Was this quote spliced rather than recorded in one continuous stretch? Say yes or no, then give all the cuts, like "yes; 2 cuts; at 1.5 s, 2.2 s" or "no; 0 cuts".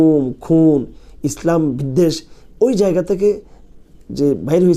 no; 0 cuts